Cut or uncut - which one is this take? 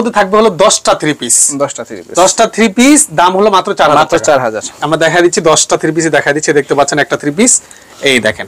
uncut